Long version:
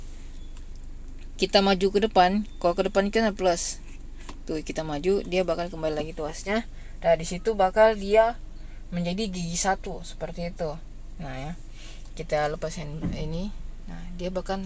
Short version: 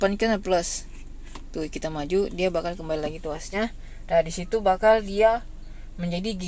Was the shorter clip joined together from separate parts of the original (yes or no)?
no